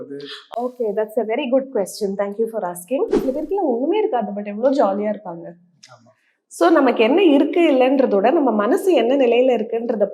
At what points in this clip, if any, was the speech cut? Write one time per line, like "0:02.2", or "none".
0:03.2